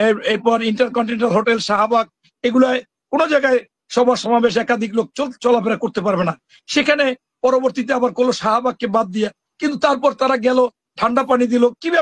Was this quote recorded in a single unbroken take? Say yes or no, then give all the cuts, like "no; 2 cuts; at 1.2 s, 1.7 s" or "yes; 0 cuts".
yes; 0 cuts